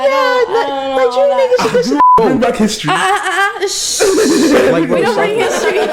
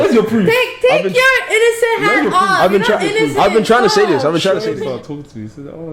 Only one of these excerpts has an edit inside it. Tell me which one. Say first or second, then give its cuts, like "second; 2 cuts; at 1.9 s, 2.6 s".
second; 1 cut; at 4.8 s